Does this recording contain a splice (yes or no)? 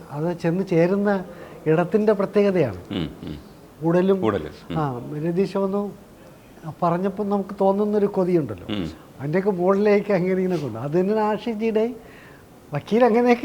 no